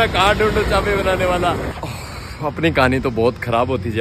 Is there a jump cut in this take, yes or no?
yes